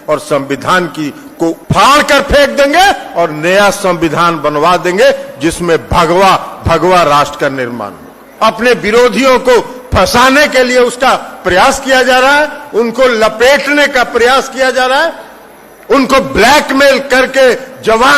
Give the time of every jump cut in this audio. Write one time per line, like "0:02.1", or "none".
0:01.6
0:08.2